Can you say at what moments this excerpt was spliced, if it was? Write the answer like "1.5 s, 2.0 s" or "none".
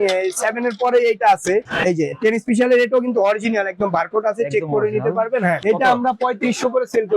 1.7 s, 5.6 s